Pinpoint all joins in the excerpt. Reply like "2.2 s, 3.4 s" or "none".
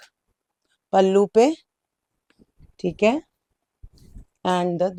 none